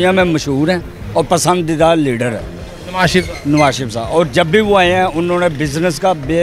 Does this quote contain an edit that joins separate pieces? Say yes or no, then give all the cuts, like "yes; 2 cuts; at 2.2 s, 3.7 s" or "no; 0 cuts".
no; 0 cuts